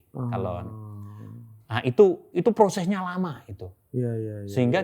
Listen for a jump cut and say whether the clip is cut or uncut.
uncut